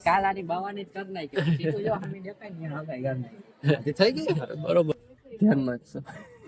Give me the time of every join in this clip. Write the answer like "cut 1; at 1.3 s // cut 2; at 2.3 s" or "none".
cut 1; at 4.9 s